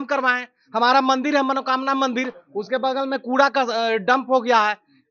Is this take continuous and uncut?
yes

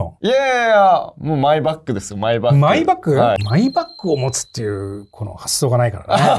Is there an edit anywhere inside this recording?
yes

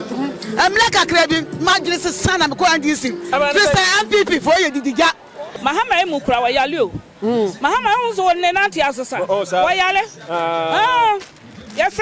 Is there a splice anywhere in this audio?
yes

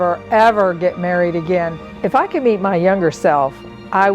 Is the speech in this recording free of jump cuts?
no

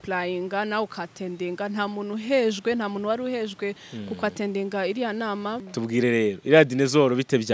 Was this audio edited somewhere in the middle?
yes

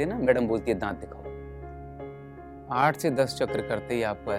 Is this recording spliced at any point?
yes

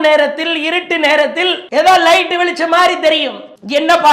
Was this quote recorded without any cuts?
no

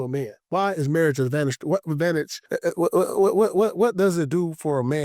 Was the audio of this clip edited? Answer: yes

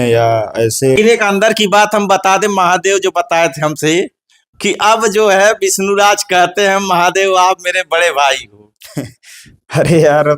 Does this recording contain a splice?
yes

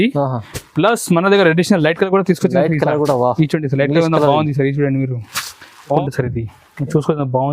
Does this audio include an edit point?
yes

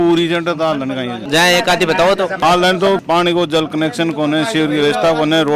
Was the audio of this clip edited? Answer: no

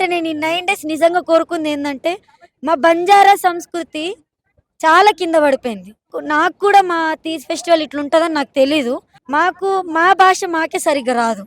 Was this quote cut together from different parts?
yes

